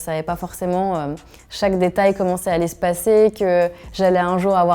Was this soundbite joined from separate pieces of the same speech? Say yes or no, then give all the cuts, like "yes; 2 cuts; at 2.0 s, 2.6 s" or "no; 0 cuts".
no; 0 cuts